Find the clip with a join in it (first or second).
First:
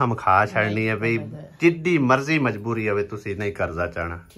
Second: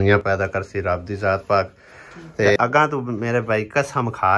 second